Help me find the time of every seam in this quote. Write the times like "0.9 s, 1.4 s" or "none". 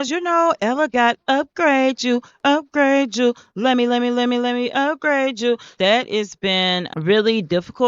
5.7 s